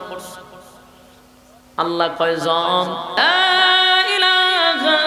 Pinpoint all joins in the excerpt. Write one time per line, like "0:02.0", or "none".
0:03.2